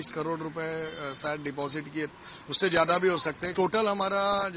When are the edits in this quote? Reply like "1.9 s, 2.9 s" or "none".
3.5 s